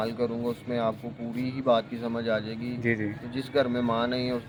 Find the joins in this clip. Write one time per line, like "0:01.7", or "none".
none

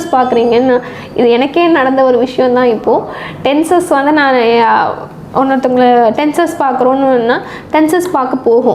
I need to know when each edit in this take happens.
none

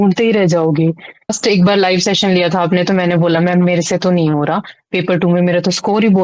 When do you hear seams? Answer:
0:01.4

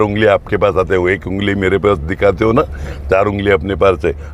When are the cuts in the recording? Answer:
none

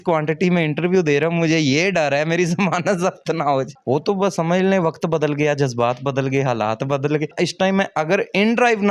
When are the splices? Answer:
0:03.7
0:07.3

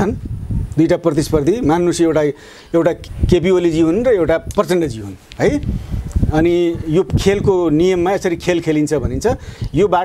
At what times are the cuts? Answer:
0:03.1

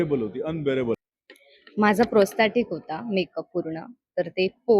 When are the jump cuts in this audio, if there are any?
0:01.2

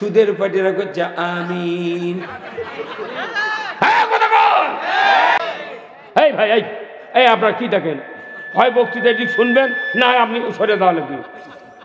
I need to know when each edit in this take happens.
0:05.4

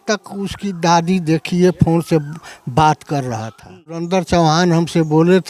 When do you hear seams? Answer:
0:04.0

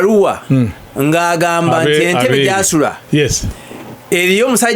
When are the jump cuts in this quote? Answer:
none

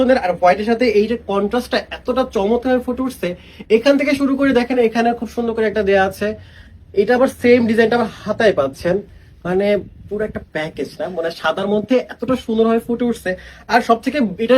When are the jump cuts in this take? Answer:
none

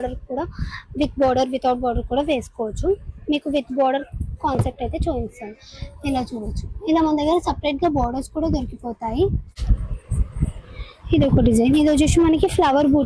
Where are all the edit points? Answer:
0:09.5

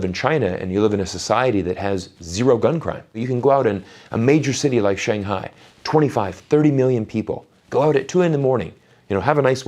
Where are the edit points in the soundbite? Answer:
0:03.2
0:08.1

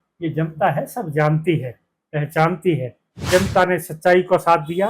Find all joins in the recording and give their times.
0:03.3

